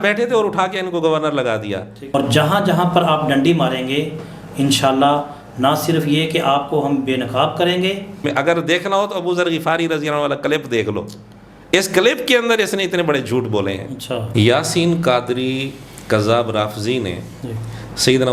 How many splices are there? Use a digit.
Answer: 3